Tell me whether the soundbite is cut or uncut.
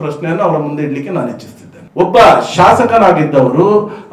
uncut